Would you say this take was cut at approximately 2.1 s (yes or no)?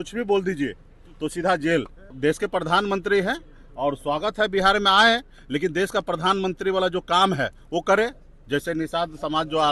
yes